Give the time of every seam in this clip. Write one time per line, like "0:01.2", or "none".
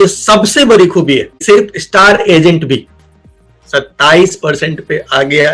0:01.3

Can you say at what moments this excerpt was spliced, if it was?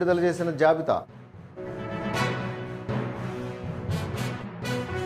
none

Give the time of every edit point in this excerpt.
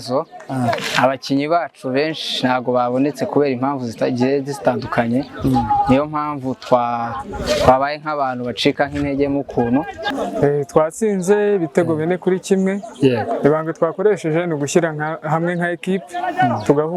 0:10.1

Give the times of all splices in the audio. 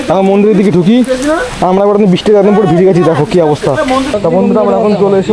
none

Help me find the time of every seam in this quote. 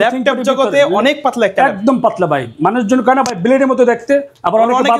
none

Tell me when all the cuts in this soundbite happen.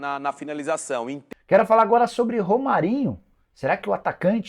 0:01.3

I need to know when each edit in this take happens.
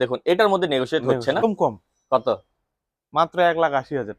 0:01.4

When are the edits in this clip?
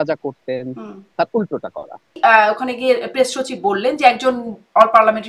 0:02.2

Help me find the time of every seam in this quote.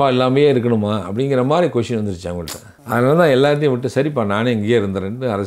none

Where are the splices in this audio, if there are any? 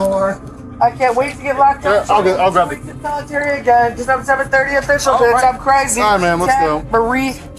none

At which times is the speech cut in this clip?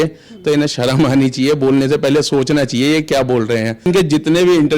0:03.9

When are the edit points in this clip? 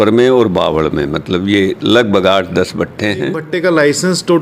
0:03.4

